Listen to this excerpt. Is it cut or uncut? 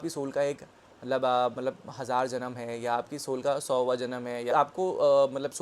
cut